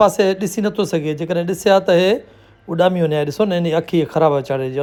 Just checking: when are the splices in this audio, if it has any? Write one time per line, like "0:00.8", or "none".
none